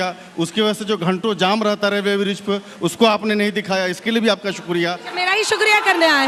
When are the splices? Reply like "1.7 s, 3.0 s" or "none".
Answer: none